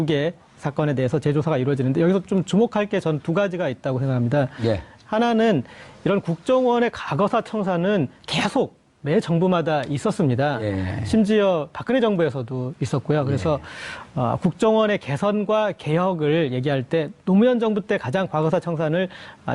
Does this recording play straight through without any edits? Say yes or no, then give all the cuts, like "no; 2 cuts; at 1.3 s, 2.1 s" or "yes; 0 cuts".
no; 1 cut; at 14.7 s